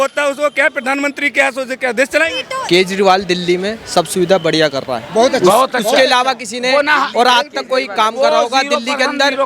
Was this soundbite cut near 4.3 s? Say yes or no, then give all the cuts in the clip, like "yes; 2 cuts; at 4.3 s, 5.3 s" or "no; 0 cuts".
no; 1 cut; at 2.4 s